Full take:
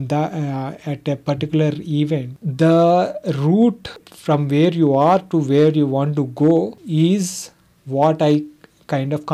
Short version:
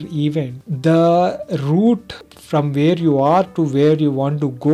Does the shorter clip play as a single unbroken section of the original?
yes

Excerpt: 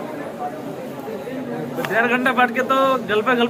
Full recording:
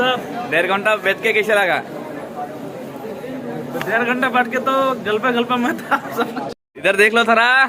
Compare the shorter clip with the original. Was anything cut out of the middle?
no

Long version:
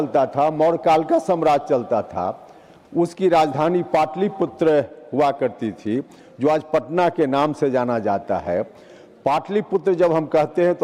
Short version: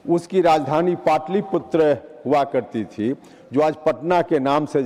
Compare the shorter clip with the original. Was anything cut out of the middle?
no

